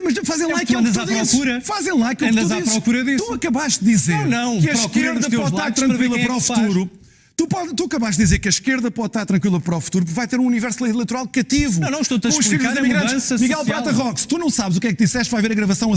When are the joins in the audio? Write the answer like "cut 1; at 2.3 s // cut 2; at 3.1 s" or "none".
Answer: none